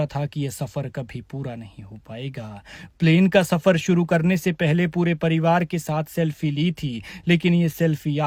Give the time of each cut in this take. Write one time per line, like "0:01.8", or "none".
none

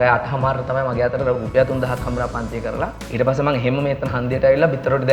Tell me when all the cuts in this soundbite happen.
0:03.0

